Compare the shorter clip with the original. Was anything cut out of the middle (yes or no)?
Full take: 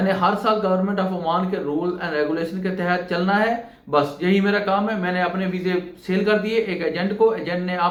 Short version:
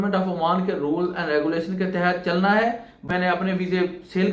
yes